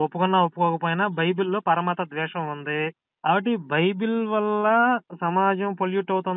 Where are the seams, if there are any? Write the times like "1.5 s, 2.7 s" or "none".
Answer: 3.0 s, 5.1 s